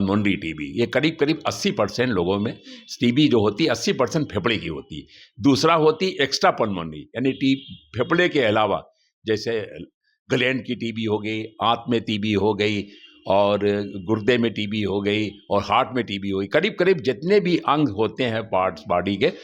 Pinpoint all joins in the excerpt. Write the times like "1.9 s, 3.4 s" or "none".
none